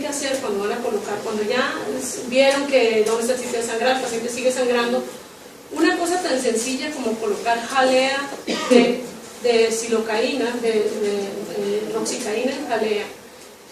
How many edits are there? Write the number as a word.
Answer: one